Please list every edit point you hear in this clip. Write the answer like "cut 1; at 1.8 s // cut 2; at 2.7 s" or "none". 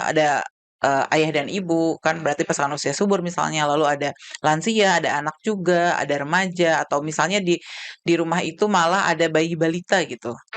none

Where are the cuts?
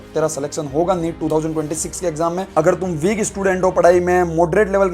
cut 1; at 2.4 s

